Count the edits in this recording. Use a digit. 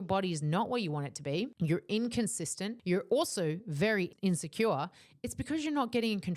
3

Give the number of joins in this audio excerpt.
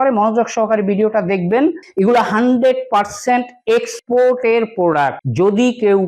1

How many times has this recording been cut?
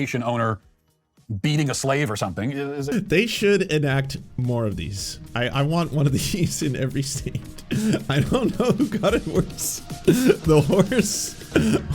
1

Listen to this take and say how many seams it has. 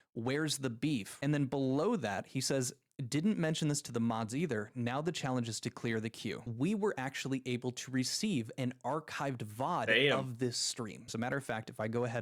2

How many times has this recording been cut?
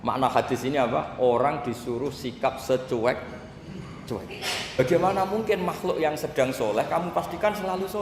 1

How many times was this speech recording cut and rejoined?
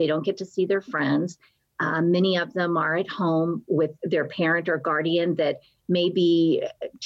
1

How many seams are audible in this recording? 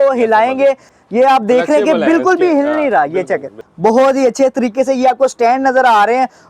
1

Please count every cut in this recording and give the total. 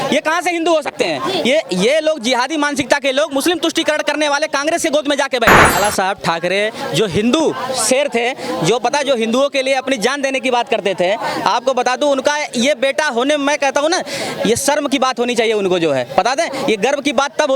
1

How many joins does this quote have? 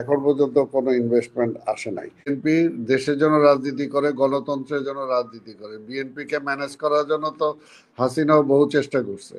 1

